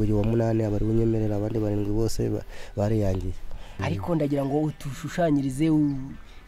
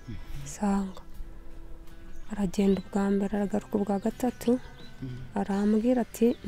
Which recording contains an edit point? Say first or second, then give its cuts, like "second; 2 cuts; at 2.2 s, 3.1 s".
first; 1 cut; at 3.8 s